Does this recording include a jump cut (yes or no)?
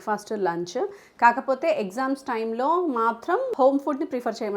yes